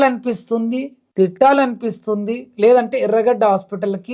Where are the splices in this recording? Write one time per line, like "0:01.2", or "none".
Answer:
none